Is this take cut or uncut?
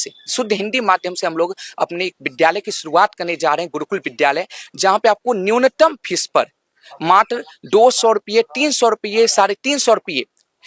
uncut